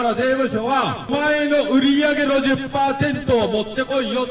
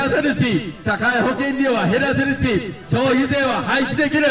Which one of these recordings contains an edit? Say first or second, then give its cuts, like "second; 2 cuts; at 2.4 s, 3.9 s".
first; 1 cut; at 1.1 s